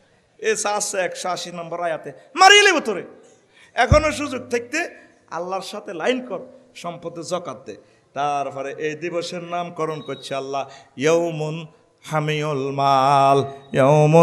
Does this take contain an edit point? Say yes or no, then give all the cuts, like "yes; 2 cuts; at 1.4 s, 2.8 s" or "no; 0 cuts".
no; 0 cuts